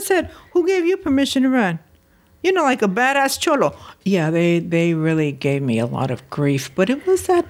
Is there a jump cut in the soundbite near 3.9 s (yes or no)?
yes